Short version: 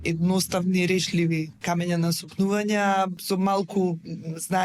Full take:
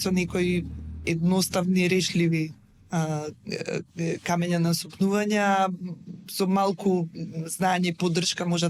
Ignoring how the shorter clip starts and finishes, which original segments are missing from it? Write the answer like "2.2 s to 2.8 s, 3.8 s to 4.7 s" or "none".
2.6 s to 4.2 s, 5.8 s to 6.3 s